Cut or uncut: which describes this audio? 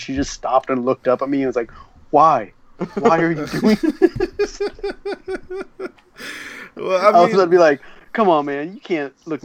uncut